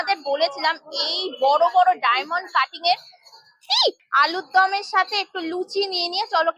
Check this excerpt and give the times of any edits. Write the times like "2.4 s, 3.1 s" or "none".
4.0 s

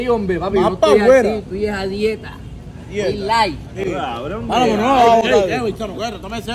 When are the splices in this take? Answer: none

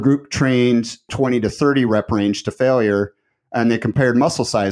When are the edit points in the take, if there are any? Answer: 1.1 s

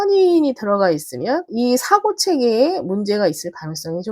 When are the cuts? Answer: 1.5 s

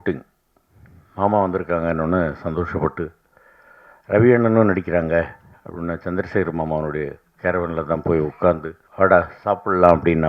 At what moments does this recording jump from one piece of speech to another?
8.8 s

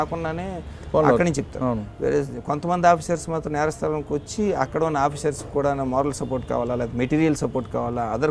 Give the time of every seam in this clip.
none

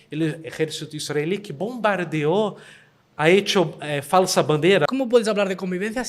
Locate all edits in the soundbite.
4.9 s

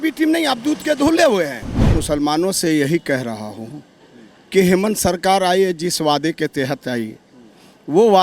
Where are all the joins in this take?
2.0 s

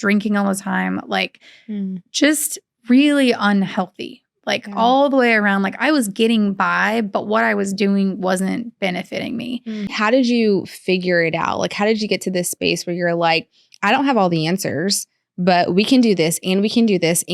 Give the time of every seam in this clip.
10.0 s

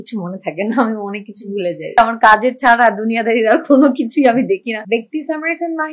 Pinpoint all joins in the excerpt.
2.0 s, 4.8 s

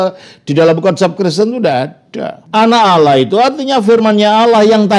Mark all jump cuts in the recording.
2.4 s

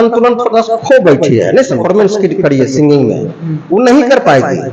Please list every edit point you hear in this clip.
1.8 s

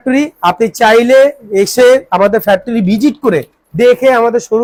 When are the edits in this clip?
none

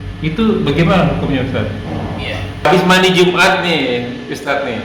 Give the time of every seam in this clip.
2.7 s

